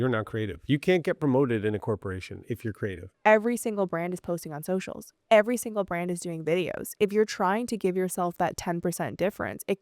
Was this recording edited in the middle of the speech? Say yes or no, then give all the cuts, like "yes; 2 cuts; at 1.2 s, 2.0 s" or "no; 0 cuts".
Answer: yes; 1 cut; at 3.1 s